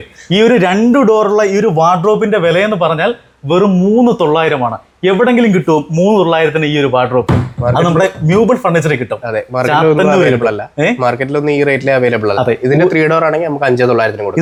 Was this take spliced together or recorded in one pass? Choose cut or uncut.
uncut